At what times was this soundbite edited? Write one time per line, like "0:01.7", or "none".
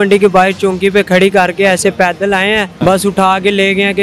0:02.7